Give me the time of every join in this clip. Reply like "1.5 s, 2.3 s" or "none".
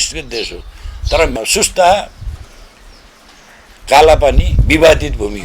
1.4 s